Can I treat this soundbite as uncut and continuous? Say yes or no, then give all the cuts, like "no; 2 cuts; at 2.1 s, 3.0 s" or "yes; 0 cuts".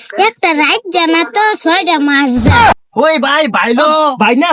no; 1 cut; at 2.7 s